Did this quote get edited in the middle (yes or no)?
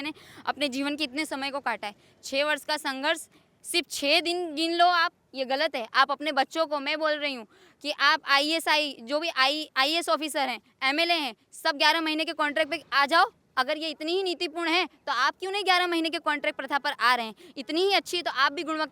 no